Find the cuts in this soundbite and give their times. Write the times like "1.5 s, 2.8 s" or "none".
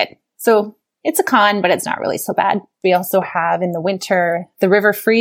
2.8 s